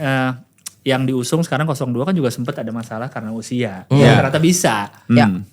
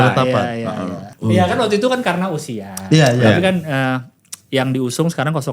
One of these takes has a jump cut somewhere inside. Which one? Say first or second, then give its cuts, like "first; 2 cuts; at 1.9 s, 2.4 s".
second; 1 cut; at 1.1 s